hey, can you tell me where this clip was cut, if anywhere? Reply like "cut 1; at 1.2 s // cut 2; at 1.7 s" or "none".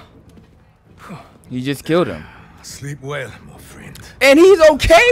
none